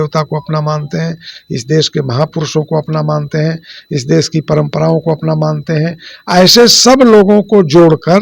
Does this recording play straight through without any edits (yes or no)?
yes